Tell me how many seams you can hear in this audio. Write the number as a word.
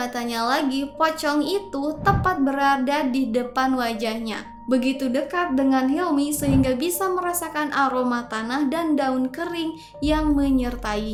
zero